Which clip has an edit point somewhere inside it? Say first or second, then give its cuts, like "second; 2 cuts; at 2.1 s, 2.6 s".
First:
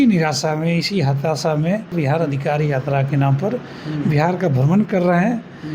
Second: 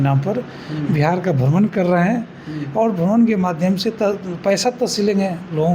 first; 1 cut; at 1.9 s